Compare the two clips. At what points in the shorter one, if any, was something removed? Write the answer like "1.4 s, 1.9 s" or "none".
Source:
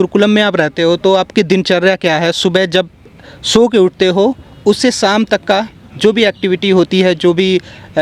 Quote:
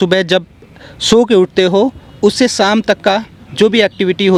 none

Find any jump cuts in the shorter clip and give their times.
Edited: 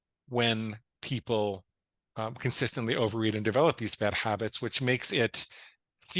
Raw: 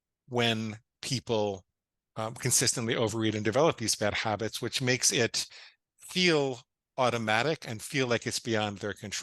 none

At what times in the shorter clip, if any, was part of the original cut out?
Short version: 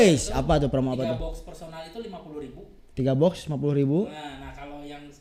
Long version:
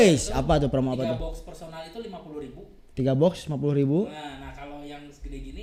none

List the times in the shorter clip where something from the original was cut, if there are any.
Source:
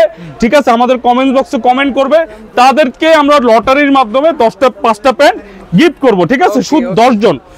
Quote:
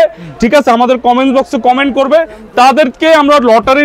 none

